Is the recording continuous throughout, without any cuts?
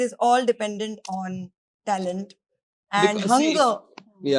yes; 0 cuts

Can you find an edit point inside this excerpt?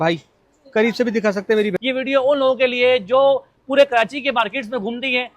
yes; 1 cut; at 1.7 s

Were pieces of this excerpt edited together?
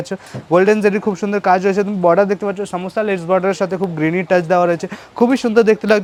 no; 0 cuts

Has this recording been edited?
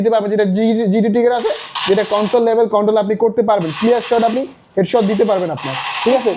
no; 0 cuts

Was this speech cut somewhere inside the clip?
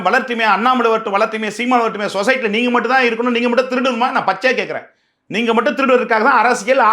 no; 0 cuts

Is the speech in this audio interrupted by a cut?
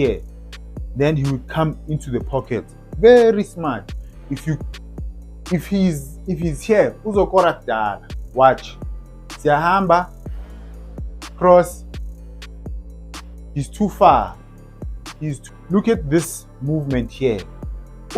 yes; 2 cuts; at 4.7 s, 15.4 s

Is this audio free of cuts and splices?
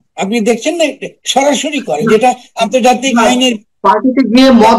yes; 0 cuts

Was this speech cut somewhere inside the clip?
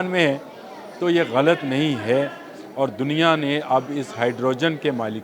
no; 0 cuts

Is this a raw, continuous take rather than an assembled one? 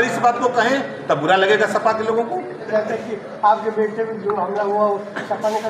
no; 1 cut; at 2.7 s

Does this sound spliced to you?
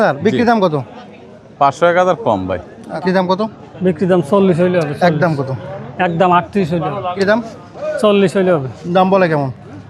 yes; 2 cuts; at 2.9 s, 7.1 s

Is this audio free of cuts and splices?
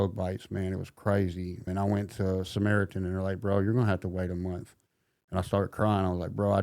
no; 1 cut; at 1.7 s

